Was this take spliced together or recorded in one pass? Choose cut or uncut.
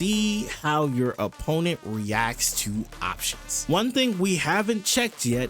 cut